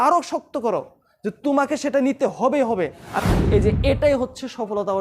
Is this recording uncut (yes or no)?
no